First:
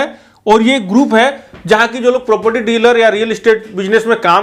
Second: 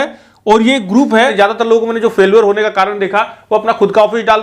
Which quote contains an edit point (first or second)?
second